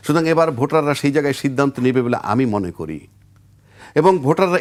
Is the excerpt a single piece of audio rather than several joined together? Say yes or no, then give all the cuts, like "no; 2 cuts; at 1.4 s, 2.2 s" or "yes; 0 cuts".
yes; 0 cuts